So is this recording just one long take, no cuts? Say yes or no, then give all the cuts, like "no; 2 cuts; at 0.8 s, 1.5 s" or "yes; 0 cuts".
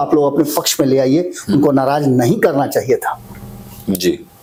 yes; 0 cuts